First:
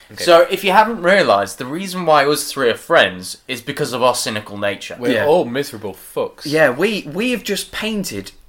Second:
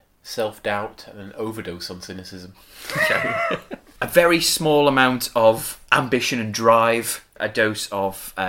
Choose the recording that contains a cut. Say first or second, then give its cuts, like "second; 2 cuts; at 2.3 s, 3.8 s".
second; 3 cuts; at 3.8 s, 5.8 s, 7.4 s